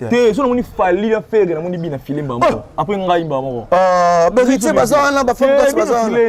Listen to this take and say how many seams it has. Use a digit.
0